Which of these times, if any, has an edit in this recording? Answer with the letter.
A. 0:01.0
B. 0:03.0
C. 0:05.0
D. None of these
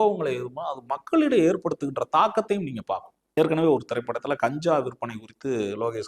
D